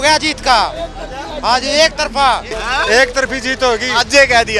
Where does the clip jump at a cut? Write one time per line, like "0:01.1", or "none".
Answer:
0:02.5